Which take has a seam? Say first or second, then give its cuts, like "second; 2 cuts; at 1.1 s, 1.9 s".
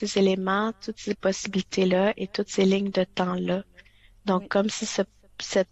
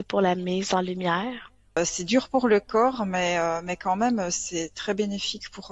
second; 1 cut; at 1.8 s